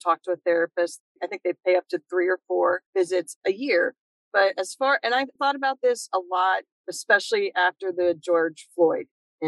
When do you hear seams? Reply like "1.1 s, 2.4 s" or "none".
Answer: 5.4 s

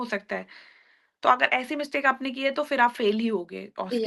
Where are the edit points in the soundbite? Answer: none

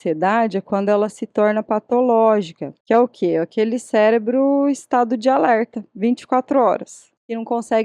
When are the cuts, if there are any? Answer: none

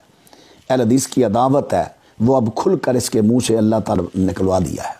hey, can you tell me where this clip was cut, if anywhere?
4.0 s

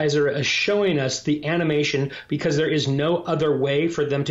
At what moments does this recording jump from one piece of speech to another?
none

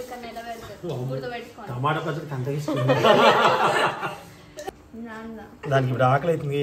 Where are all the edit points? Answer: 4.6 s

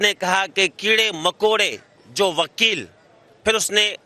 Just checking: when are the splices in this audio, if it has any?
none

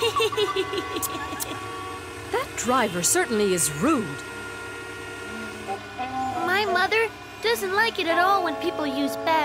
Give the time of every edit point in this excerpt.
3.8 s

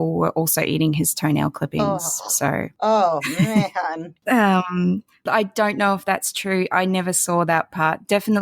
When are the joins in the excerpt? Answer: 2.7 s, 4.1 s, 5.2 s

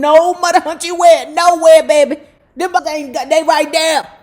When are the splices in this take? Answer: 2.8 s

